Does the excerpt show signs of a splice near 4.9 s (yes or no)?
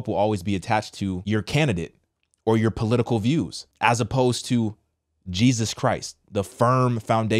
no